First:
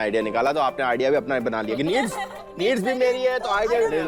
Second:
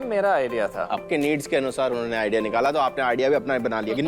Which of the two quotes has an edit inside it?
second; 1 cut; at 1.0 s

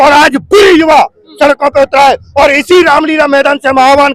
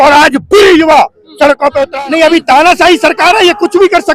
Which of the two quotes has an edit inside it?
second; 1 cut; at 1.9 s

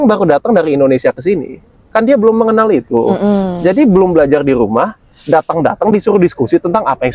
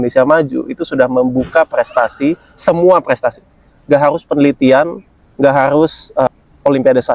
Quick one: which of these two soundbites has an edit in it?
second; 1 cut; at 6.3 s

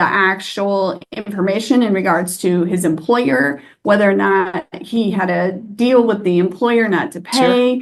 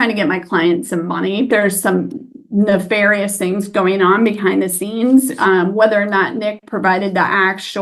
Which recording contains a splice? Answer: second; 1 cut; at 1.5 s

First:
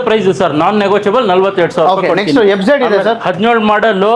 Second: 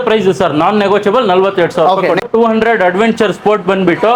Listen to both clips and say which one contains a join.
second; 1 cut; at 2.3 s

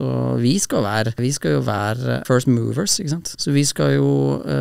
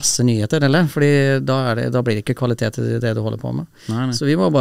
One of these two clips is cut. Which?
first; 3 cuts; at 1.2 s, 2.2 s, 3.3 s

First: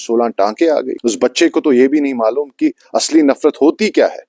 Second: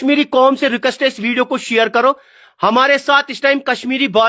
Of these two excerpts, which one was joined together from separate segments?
first; 1 cut; at 0.9 s

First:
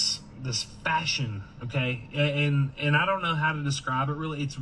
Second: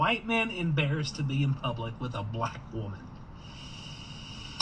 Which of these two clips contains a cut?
first; 1 cut; at 2.7 s

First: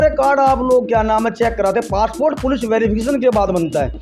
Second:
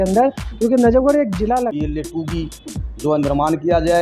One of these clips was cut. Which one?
second; 1 cut; at 1.7 s

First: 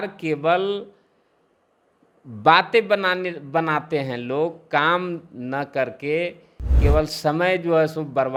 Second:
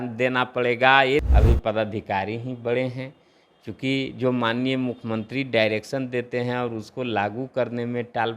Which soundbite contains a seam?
second; 1 cut; at 1.3 s

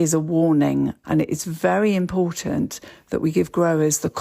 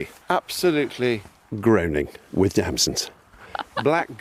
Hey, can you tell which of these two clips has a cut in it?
first; 1 cut; at 1.0 s

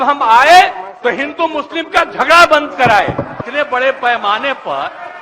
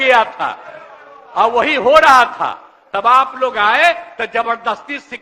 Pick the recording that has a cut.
first; 1 cut; at 3.4 s

